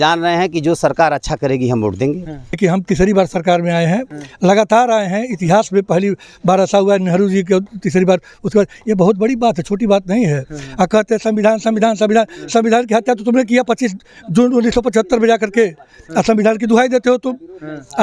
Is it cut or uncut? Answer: cut